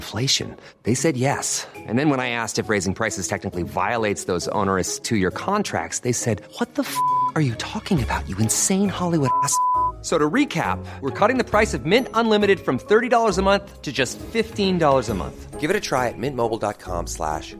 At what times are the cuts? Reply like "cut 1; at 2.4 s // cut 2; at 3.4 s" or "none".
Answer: none